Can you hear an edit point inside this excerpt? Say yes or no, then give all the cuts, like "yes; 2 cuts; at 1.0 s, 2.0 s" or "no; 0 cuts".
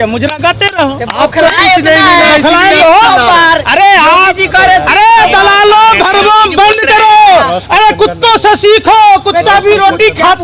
no; 0 cuts